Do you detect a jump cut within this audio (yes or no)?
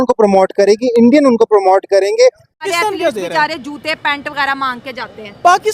yes